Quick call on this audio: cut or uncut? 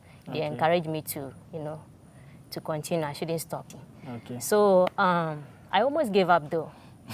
cut